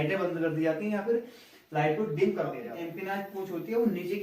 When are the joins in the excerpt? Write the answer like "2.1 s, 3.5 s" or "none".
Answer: 2.5 s